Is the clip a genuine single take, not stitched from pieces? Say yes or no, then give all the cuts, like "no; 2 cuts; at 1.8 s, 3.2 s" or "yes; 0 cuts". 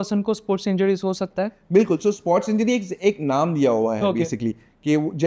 yes; 0 cuts